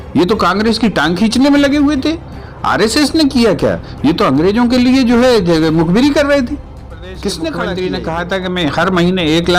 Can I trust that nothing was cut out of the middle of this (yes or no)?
no